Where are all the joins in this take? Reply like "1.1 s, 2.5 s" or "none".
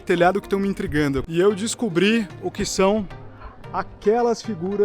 1.2 s